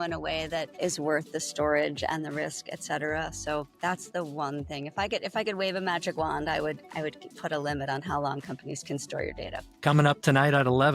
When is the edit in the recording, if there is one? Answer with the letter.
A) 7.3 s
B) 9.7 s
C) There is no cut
B